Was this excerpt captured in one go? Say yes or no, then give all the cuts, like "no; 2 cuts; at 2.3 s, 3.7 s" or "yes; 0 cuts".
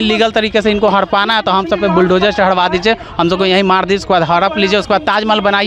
yes; 0 cuts